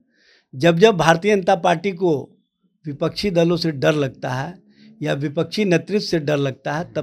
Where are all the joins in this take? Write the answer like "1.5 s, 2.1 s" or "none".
none